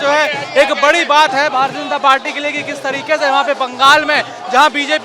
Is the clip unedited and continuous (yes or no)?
yes